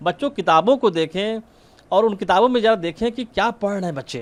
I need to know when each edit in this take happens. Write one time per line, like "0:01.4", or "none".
none